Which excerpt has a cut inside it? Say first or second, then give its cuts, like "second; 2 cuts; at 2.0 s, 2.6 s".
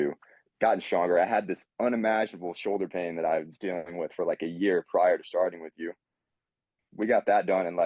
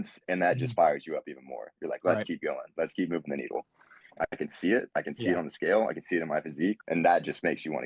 second; 3 cuts; at 2.7 s, 4.2 s, 6.8 s